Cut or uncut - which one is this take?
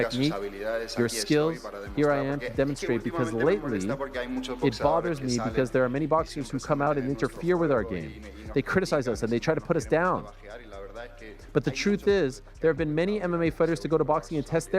uncut